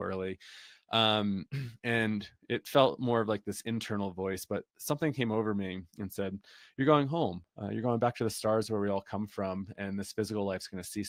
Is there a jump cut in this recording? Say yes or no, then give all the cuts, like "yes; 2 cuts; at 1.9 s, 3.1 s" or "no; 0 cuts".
no; 0 cuts